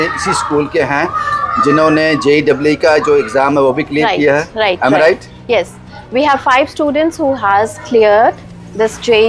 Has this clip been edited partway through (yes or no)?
no